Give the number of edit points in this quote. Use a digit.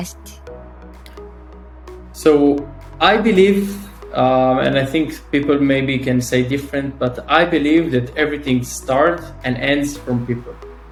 0